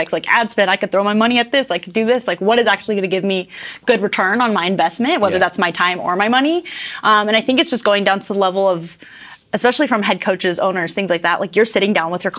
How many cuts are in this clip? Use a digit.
0